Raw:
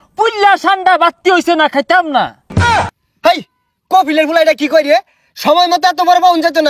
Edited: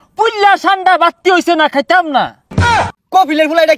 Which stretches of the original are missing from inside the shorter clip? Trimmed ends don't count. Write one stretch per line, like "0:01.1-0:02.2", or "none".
0:02.6-0:03.4